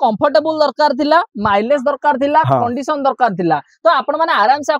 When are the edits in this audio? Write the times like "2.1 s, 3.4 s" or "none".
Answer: none